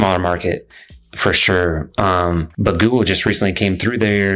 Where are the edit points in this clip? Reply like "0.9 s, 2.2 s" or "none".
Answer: 2.5 s